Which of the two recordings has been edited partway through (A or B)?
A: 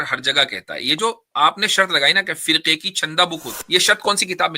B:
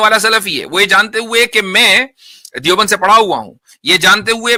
A